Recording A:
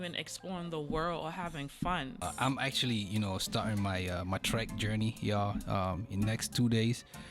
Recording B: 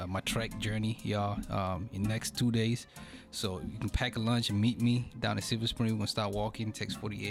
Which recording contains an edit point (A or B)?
A